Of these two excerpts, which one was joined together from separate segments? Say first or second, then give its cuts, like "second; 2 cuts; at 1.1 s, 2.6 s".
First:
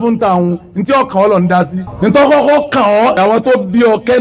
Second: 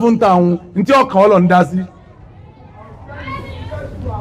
first; 2 cuts; at 1.8 s, 3.1 s